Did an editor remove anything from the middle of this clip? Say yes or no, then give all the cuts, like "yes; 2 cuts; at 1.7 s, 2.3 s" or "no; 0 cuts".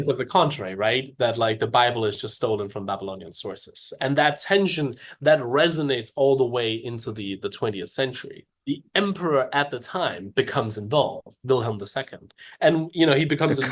yes; 1 cut; at 8.4 s